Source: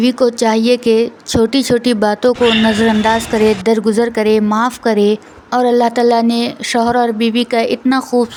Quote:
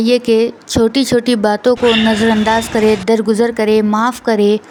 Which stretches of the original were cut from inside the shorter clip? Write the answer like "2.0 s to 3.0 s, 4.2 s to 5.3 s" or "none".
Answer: none